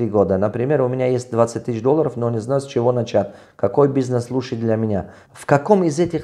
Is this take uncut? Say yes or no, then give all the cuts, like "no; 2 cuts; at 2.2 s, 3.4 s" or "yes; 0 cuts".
no; 1 cut; at 5.2 s